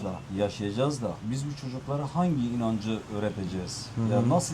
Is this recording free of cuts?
yes; 0 cuts

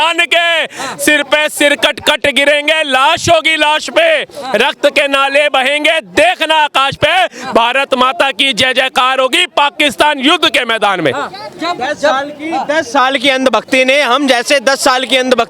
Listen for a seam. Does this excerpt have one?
no; 0 cuts

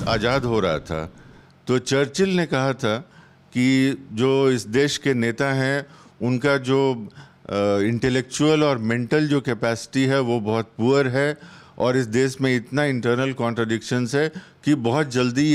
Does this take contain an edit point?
no; 0 cuts

